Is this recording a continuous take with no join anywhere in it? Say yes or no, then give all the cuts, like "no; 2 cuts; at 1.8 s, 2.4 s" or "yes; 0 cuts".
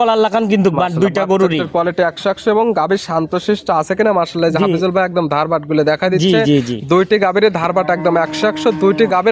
yes; 0 cuts